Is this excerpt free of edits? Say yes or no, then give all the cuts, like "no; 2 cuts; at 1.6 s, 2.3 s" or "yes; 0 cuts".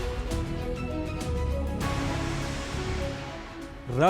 no; 1 cut; at 1.9 s